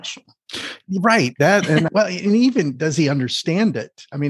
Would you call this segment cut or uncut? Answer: cut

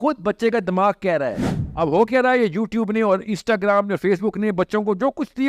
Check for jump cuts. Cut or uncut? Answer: cut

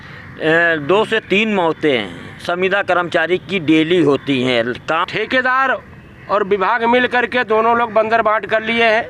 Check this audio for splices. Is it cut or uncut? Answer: cut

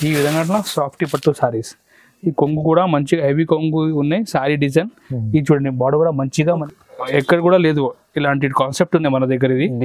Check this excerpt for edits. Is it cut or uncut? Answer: cut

